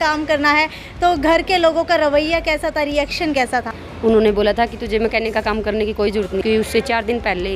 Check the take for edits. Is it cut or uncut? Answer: cut